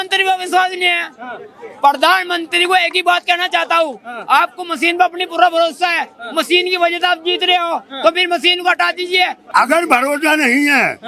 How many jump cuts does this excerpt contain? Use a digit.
1